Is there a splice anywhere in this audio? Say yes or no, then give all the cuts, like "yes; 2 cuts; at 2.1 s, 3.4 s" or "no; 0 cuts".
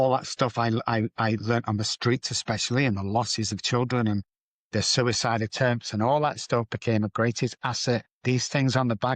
no; 0 cuts